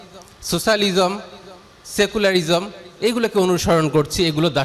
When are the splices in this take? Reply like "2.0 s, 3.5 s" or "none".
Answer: none